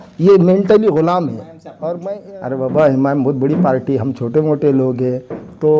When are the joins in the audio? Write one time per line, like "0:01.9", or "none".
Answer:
0:02.0